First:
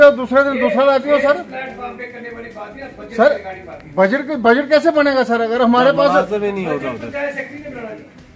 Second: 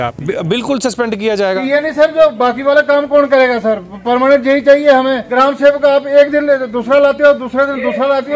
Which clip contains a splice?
second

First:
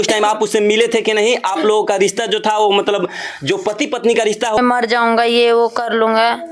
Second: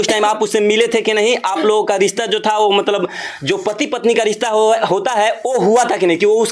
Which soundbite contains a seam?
first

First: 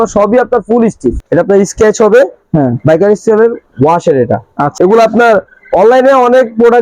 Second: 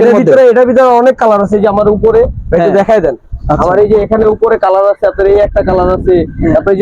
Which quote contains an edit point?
first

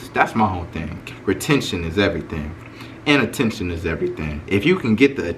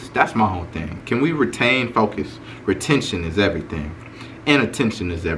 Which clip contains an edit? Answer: first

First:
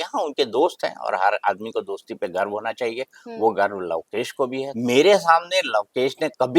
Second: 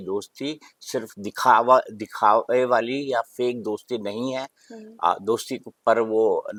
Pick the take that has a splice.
first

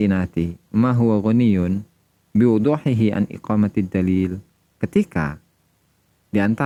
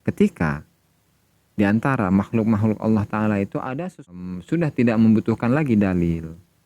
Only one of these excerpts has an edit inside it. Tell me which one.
second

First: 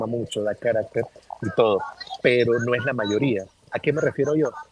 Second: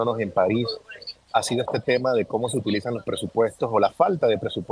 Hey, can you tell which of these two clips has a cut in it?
first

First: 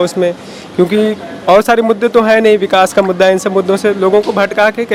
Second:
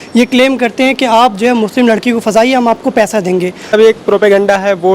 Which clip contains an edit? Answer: second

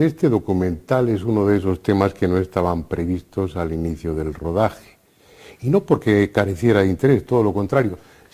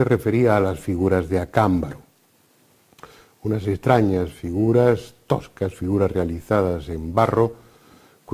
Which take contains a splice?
second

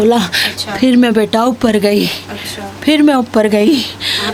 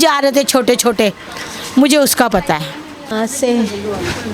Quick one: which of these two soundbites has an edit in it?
second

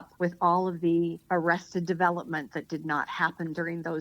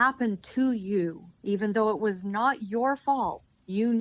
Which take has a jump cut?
second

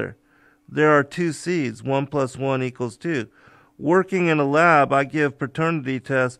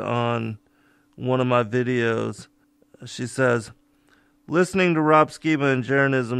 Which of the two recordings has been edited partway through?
second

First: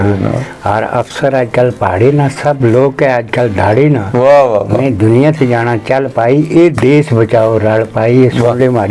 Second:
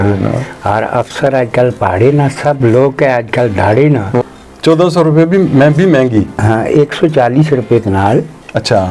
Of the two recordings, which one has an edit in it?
second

